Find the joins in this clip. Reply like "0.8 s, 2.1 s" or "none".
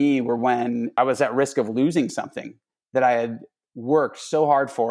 0.9 s